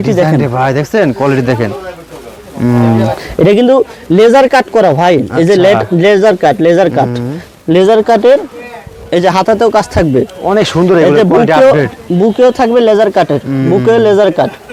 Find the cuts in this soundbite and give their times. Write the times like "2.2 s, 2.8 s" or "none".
none